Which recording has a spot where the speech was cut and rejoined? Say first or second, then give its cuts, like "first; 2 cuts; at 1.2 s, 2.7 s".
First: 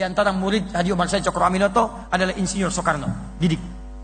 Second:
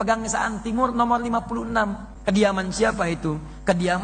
second; 1 cut; at 2.1 s